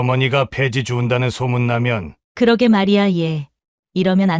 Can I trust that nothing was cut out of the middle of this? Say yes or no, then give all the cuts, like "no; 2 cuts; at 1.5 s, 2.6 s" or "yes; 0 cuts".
yes; 0 cuts